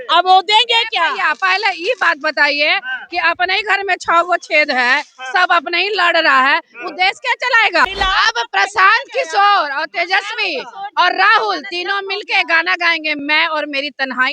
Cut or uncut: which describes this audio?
cut